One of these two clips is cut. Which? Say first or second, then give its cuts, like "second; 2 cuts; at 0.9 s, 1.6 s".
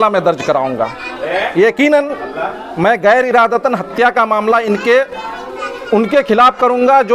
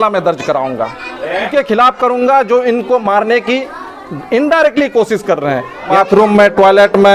second; 2 cuts; at 1.5 s, 5.9 s